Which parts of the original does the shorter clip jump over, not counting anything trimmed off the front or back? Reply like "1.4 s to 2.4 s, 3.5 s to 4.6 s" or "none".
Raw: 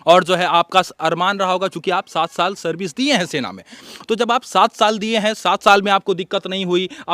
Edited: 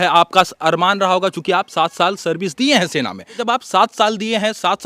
3.8 s to 4.2 s

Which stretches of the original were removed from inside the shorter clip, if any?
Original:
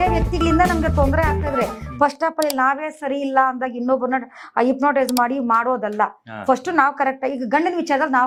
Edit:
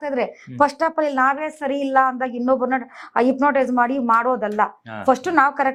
none

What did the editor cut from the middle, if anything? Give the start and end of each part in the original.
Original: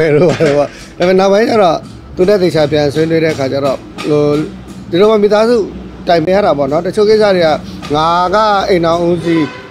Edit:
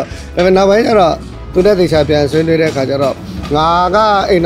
3.9 s to 7.7 s

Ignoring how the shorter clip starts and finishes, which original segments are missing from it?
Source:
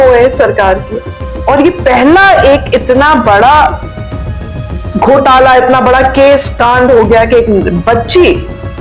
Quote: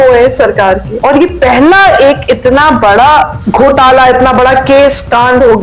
0.9 s to 1.3 s, 3.8 s to 4.9 s

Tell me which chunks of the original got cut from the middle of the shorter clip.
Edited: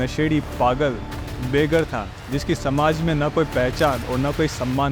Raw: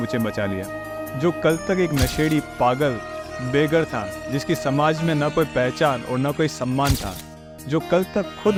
none

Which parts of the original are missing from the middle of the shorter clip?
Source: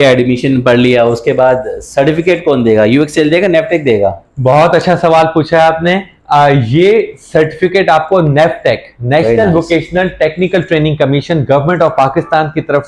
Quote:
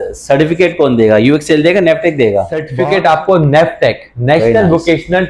4.3 s to 7.5 s

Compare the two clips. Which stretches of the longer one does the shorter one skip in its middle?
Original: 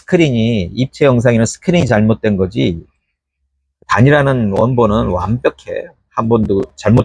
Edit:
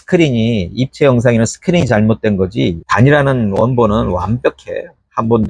2.8 s to 3.8 s

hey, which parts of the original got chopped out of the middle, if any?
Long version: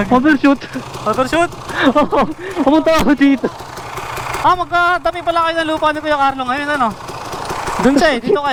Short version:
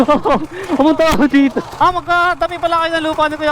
3.6 s to 4.3 s

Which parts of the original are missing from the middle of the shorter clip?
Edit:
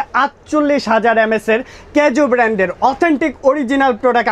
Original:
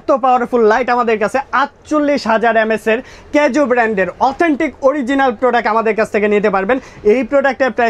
none

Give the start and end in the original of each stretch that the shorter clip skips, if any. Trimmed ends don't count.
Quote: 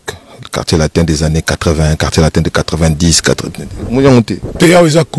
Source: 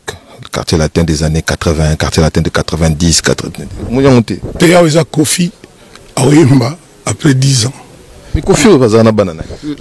none

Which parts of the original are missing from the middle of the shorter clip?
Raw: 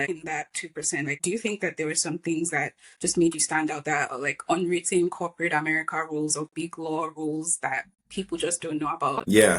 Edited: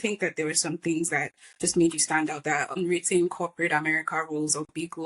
4.2 s to 4.6 s

